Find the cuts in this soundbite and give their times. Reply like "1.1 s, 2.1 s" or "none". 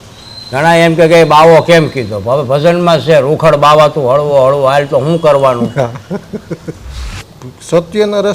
7.3 s